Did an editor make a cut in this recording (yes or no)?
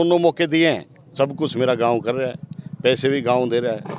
yes